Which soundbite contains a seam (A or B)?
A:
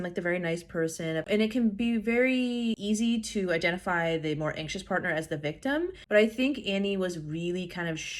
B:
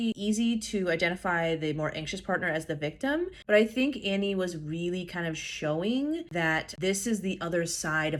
A